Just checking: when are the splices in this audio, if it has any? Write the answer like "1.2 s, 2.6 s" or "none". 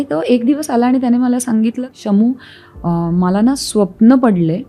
1.9 s